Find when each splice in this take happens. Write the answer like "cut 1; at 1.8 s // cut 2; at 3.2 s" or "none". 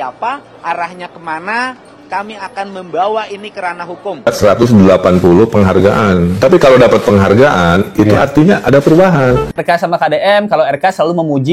cut 1; at 4.3 s // cut 2; at 9.6 s